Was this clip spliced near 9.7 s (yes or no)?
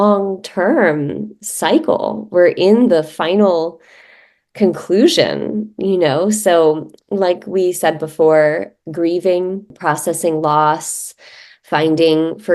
yes